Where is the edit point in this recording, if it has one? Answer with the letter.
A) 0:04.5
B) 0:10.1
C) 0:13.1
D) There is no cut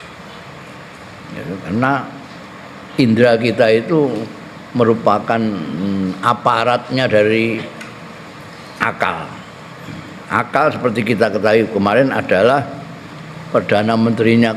D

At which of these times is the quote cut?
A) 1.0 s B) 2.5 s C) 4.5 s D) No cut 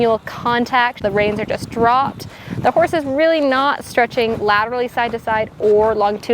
A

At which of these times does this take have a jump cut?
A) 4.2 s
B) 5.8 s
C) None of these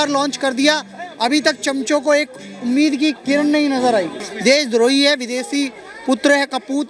A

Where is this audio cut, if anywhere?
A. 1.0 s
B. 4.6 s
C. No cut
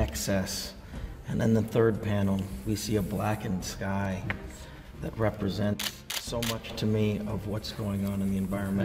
A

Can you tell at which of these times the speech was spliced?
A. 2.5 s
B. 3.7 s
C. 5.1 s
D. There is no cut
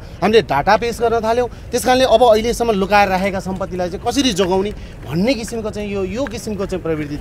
D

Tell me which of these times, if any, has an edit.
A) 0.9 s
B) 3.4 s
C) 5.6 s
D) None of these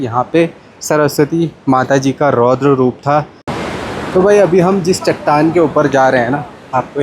B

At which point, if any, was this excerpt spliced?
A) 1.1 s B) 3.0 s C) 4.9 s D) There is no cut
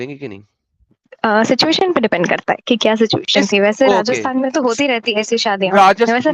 A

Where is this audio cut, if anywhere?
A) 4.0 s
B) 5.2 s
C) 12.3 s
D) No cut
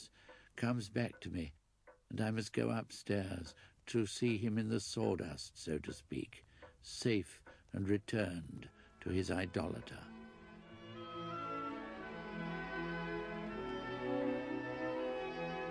A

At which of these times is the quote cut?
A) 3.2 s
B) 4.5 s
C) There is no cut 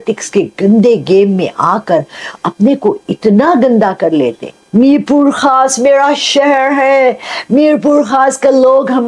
B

